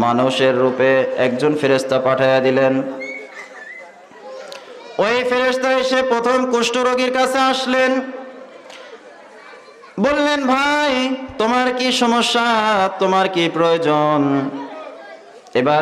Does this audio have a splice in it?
no; 0 cuts

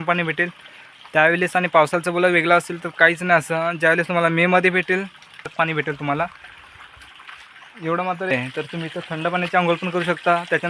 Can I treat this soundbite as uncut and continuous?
no; 2 cuts; at 5.4 s, 8.3 s

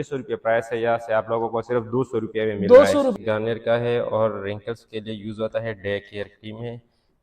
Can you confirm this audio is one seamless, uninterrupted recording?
no; 1 cut; at 3.1 s

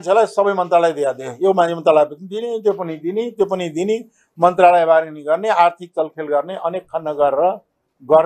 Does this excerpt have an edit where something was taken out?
no; 0 cuts

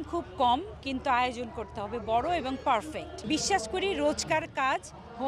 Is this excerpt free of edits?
no; 1 cut; at 3.1 s

